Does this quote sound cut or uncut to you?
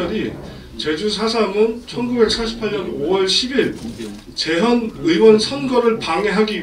uncut